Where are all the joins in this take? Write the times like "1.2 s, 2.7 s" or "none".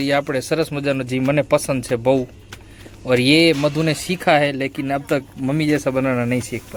none